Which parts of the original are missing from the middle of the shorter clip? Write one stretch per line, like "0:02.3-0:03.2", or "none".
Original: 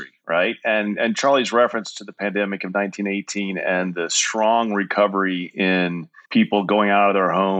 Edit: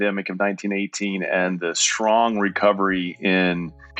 none